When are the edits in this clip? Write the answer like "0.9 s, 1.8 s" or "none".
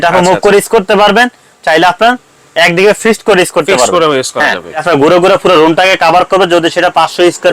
4.8 s